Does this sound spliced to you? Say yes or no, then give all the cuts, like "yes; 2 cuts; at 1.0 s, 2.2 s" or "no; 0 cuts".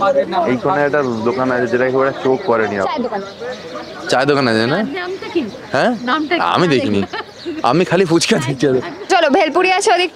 yes; 1 cut; at 9.0 s